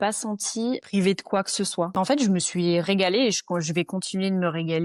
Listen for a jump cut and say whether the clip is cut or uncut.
cut